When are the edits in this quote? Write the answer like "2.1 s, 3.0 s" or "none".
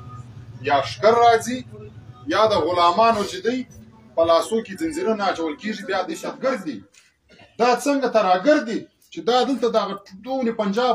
6.1 s